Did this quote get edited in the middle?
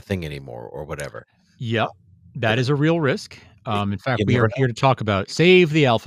no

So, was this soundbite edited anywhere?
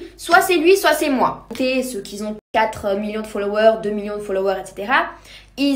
yes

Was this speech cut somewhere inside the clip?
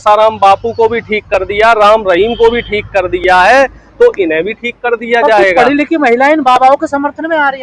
no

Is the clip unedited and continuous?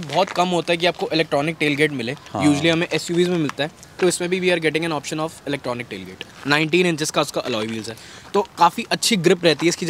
no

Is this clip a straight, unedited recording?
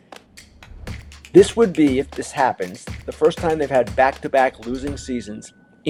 yes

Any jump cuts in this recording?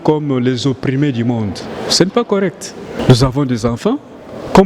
yes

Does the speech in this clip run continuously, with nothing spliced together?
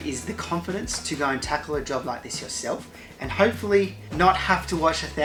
yes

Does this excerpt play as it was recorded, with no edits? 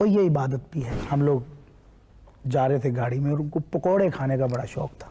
no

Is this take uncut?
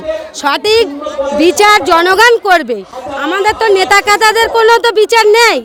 yes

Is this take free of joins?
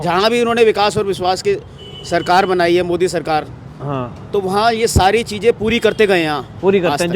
yes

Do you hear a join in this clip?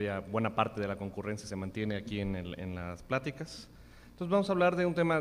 yes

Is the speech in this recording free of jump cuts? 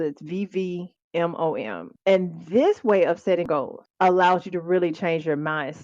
no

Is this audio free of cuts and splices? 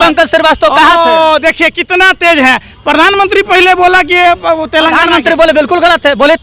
yes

